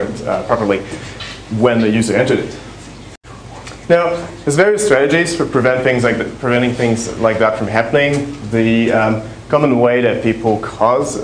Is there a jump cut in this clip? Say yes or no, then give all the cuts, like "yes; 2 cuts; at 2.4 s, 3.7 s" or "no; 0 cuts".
no; 0 cuts